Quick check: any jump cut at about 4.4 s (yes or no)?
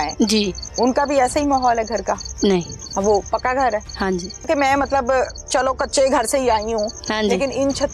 yes